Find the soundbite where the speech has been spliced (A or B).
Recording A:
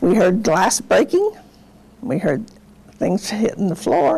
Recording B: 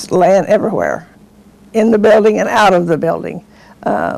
A